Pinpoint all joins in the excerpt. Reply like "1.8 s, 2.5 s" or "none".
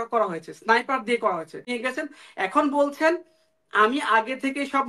1.9 s